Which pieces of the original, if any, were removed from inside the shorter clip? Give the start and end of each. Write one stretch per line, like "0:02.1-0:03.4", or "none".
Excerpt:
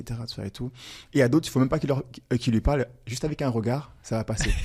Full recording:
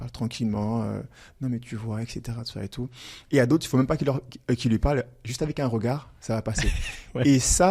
none